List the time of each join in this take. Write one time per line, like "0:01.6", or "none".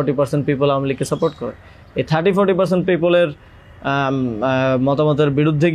none